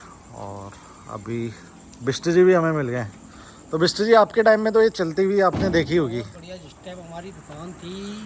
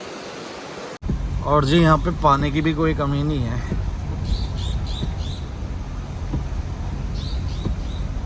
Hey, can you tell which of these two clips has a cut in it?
second; 1 cut; at 1.0 s

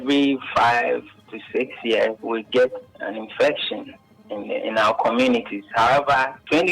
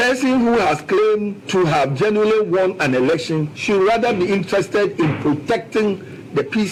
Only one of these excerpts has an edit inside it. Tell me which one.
first; 1 cut; at 2.2 s

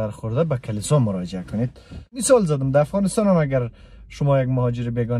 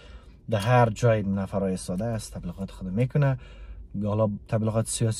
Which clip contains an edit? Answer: first; 1 cut; at 2.2 s

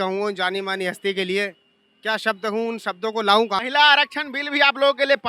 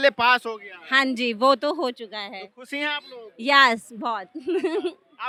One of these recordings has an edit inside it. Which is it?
first; 1 cut; at 3.6 s

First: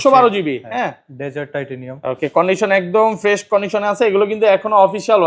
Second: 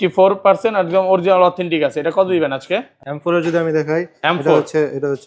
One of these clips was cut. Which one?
second; 1 cut; at 3.0 s

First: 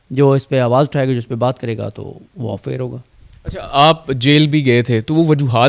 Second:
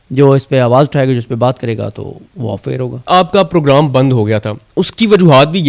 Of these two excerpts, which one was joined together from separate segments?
second; 1 cut; at 3.1 s

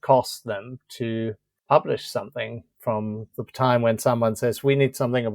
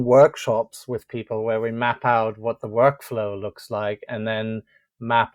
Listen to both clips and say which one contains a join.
first; 1 cut; at 1.5 s

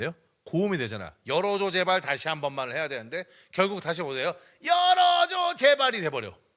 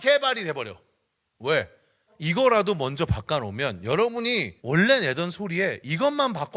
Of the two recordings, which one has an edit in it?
second; 2 cuts; at 2.1 s, 4.5 s

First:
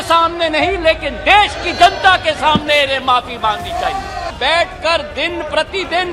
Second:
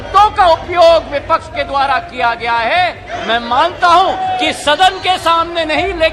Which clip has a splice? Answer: first; 1 cut; at 4.3 s

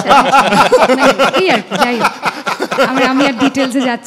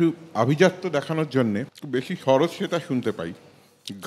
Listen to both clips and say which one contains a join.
second; 1 cut; at 1.7 s

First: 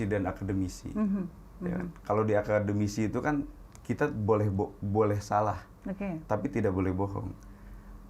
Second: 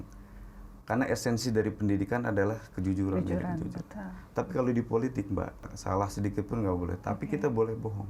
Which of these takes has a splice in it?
second; 1 cut; at 5.6 s

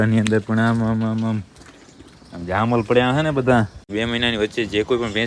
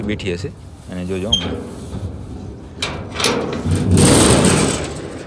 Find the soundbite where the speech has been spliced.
first; 1 cut; at 3.9 s

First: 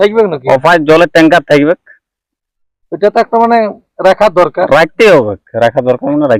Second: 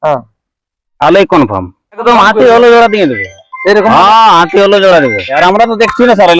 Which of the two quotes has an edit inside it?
second; 2 cuts; at 2.0 s, 5.4 s

